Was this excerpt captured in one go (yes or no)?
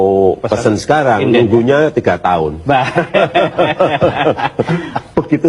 yes